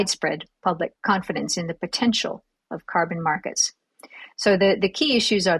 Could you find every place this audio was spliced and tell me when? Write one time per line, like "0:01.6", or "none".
0:01.0